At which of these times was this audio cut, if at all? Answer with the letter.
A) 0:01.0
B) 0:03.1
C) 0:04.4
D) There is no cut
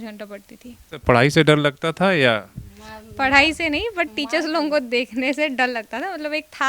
A